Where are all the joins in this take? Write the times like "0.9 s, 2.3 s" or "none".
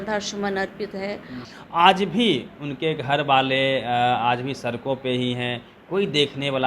1.4 s